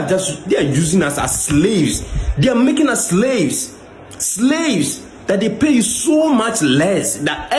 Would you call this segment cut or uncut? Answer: uncut